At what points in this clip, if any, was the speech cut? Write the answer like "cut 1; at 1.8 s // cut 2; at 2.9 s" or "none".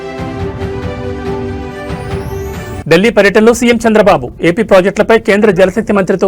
cut 1; at 2.8 s